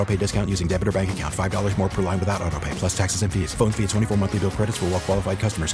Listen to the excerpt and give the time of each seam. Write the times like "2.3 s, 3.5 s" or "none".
none